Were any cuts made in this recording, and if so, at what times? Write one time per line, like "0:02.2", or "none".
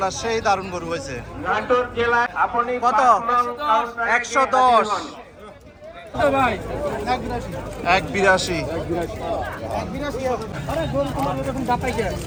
none